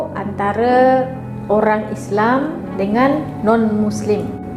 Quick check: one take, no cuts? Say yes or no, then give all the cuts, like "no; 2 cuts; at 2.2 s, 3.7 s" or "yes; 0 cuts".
yes; 0 cuts